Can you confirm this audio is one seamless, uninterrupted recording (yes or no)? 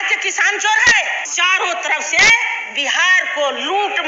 no